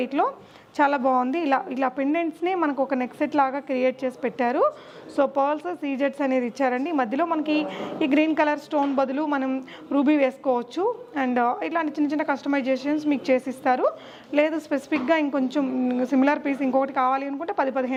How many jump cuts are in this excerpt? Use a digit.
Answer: 0